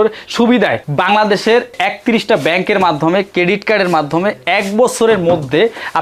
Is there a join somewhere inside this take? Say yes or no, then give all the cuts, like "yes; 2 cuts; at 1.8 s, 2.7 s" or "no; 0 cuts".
no; 0 cuts